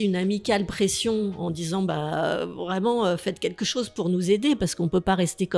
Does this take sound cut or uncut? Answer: uncut